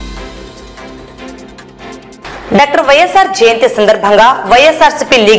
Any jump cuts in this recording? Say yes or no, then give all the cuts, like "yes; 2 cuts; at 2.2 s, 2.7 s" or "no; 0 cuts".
no; 0 cuts